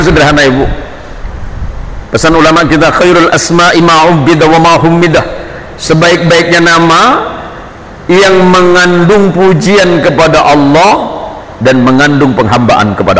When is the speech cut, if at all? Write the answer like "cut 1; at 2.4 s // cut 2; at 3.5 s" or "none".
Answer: none